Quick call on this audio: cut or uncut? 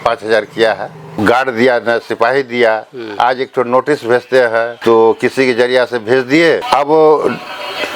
cut